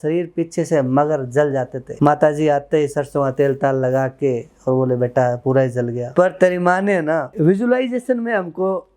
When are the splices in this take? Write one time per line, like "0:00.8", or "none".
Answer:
0:06.0